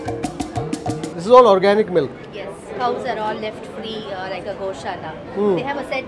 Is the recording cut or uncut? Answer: cut